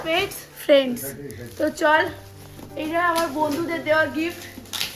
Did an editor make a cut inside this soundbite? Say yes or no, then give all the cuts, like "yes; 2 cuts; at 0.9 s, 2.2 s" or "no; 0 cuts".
no; 0 cuts